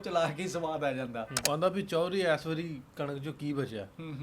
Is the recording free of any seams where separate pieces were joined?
no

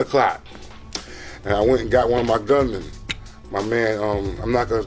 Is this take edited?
no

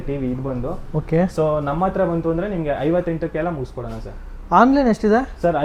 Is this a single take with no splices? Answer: yes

